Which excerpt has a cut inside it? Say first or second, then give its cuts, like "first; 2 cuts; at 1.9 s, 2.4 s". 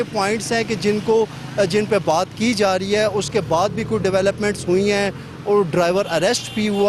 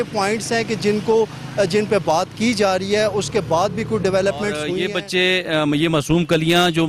second; 1 cut; at 4.7 s